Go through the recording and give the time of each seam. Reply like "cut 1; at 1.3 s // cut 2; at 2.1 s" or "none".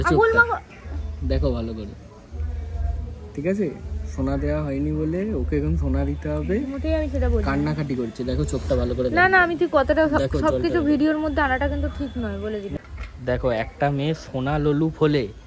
cut 1; at 12.7 s